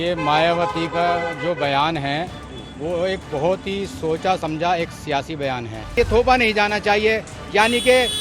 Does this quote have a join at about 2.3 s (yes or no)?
no